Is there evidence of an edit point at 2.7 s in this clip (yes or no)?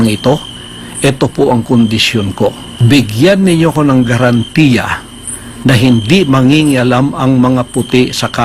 yes